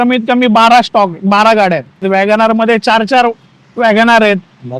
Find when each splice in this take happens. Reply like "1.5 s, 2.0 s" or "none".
2.0 s

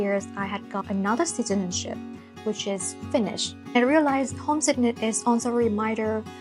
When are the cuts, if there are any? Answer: 3.6 s

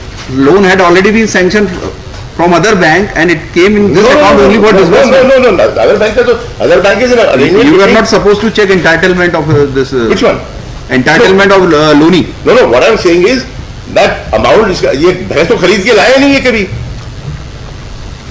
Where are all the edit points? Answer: none

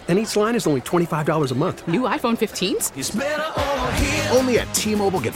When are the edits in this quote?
none

